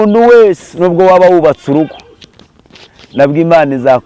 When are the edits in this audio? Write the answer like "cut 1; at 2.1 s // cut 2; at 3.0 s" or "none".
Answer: none